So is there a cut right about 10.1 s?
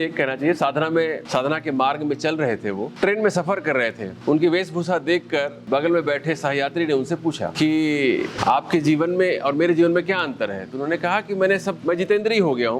no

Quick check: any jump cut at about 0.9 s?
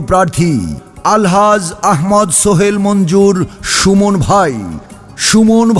yes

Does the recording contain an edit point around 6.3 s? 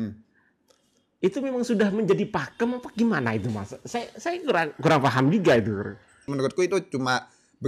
yes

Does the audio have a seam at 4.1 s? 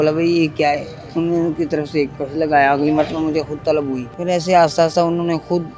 yes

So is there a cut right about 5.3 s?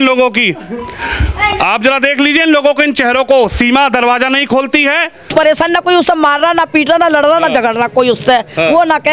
yes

